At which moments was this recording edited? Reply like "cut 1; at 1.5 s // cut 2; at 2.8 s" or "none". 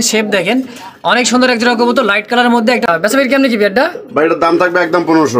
cut 1; at 2.8 s